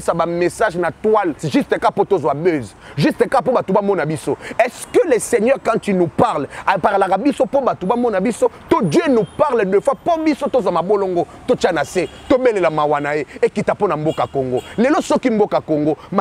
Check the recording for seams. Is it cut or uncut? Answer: cut